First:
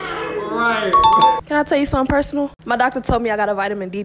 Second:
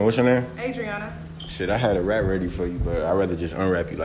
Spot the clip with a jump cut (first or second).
first